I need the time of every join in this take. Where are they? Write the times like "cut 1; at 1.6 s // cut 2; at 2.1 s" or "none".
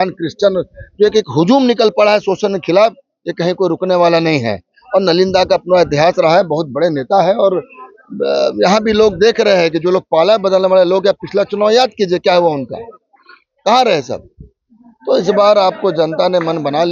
none